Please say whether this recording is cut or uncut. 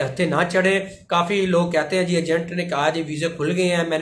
uncut